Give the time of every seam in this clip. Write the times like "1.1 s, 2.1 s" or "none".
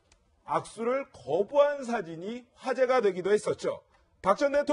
none